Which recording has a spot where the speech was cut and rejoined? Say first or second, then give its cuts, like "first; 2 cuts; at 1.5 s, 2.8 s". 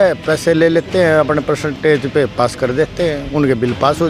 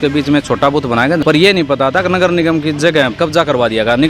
second; 2 cuts; at 1.2 s, 3.1 s